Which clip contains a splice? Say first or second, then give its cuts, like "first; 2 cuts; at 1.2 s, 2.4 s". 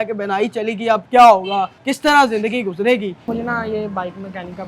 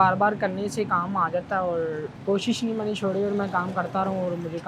first; 1 cut; at 3.2 s